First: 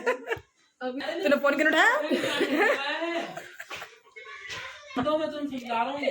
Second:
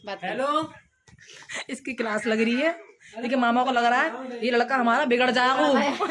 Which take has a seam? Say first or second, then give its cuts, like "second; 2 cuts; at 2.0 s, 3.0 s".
first; 2 cuts; at 1.0 s, 5.0 s